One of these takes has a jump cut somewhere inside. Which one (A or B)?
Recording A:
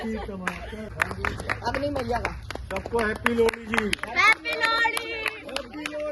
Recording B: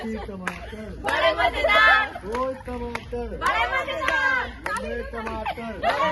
A